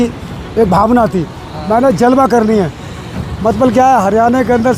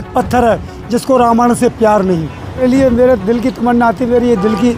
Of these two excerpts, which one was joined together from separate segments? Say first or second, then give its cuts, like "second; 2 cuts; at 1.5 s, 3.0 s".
second; 1 cut; at 2.6 s